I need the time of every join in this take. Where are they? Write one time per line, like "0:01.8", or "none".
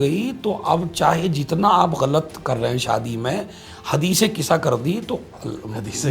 none